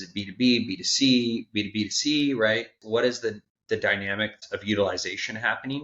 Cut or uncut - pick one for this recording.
cut